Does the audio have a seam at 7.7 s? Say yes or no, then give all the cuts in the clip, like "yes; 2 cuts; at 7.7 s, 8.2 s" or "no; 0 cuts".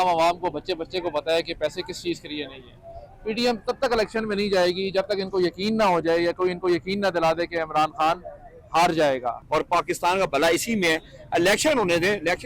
no; 1 cut; at 9.4 s